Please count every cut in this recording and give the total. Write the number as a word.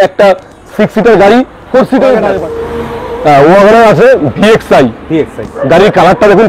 one